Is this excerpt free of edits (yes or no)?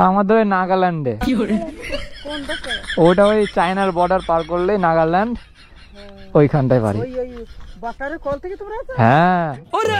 yes